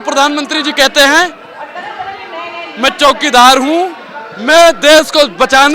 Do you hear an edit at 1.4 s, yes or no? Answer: no